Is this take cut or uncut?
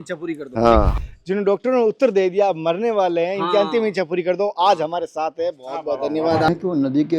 cut